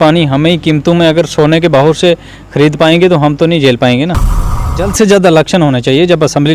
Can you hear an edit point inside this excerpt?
yes; 1 cut; at 4.6 s

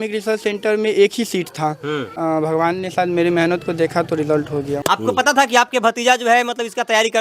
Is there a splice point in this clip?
yes; 2 cuts; at 2.1 s, 4.8 s

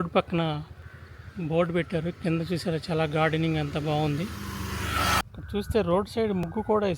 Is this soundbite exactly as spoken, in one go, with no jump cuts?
no; 1 cut; at 5.2 s

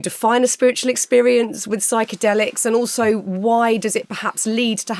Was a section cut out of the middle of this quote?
no; 0 cuts

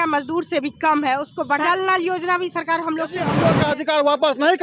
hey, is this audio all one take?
no; 2 cuts; at 1.6 s, 3.4 s

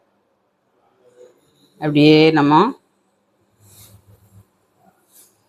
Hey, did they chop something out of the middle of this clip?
no; 0 cuts

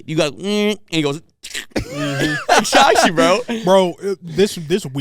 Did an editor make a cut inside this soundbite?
no; 0 cuts

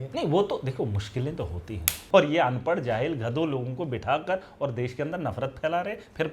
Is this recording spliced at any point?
yes; 1 cut; at 2.0 s

